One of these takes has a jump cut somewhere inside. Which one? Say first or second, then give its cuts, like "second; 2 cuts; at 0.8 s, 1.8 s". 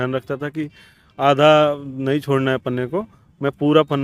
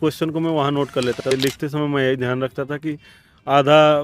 second; 1 cut; at 1.3 s